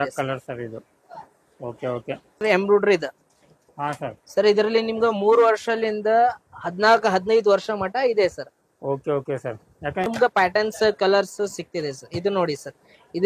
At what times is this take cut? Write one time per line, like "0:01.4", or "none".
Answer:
0:02.4
0:10.1